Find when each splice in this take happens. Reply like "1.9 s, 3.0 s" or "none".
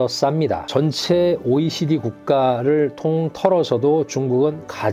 none